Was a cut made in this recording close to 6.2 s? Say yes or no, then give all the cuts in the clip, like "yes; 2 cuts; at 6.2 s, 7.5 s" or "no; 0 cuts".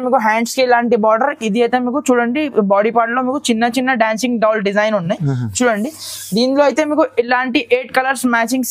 no; 0 cuts